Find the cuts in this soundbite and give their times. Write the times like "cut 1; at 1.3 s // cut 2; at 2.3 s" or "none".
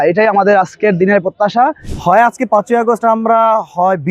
cut 1; at 1.9 s